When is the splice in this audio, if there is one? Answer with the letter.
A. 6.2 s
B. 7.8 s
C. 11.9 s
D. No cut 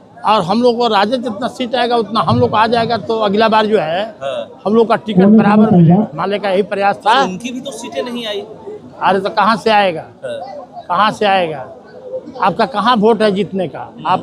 A